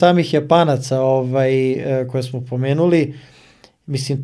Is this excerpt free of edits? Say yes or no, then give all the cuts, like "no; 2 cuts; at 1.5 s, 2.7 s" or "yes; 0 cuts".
yes; 0 cuts